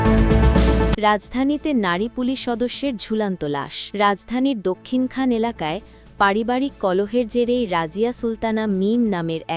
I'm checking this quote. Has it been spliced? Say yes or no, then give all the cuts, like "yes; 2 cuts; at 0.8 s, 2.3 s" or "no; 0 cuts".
yes; 2 cuts; at 0.9 s, 3.8 s